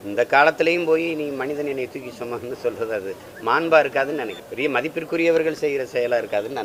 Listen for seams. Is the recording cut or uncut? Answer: cut